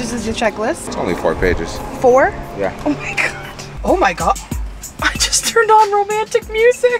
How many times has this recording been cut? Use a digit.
2